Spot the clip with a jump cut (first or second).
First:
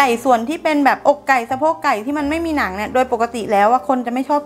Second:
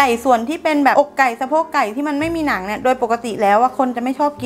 second